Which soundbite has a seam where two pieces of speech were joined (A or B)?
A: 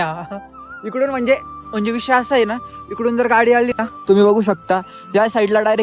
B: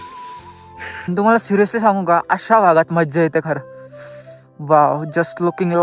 B